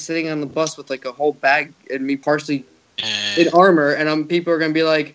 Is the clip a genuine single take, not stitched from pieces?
no; 1 cut; at 2.2 s

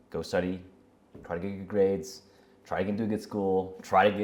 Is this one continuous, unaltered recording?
yes; 0 cuts

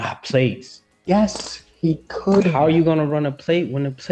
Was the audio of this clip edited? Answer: no; 0 cuts

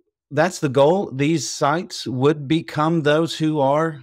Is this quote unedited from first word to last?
yes; 0 cuts

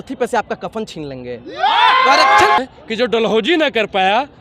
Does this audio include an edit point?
yes; 1 cut; at 2.6 s

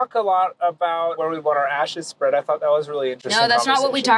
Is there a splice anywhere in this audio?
yes; 1 cut; at 1.2 s

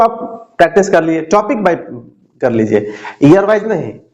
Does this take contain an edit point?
no; 0 cuts

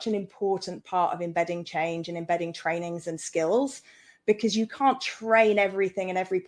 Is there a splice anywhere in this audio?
no; 0 cuts

